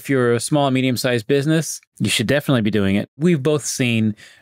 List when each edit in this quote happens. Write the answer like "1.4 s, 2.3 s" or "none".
1.8 s, 3.2 s